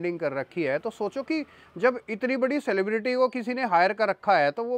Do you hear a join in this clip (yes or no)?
no